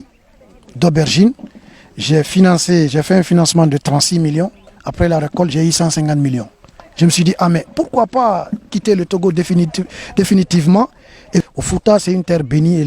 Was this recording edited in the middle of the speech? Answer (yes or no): yes